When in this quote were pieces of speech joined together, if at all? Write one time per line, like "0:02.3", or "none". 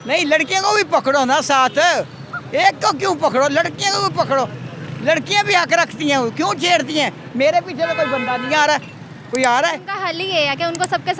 0:10.0

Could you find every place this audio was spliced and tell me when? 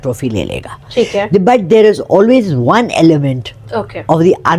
none

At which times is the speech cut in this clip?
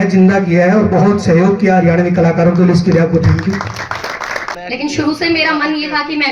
0:04.5

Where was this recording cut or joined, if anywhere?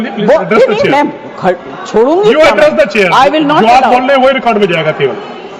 none

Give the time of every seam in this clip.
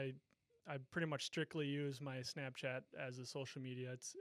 none

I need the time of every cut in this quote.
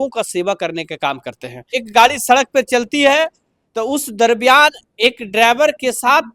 0:01.8

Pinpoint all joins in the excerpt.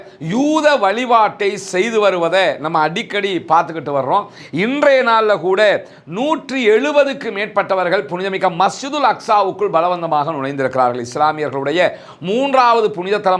none

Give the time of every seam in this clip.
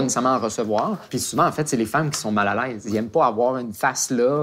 none

